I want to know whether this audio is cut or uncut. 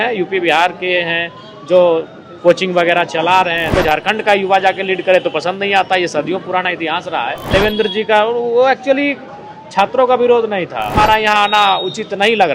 cut